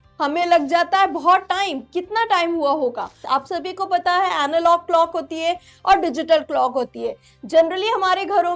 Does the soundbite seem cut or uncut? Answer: cut